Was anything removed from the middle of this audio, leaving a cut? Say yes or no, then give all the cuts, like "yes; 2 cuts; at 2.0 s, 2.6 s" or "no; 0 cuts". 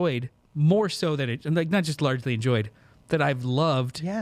no; 0 cuts